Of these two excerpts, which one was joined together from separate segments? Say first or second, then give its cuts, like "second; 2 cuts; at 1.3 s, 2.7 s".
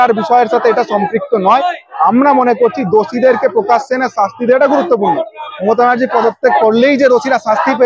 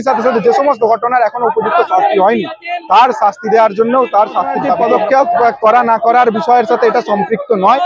second; 1 cut; at 4.8 s